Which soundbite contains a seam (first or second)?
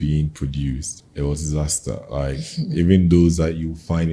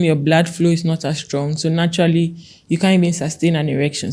first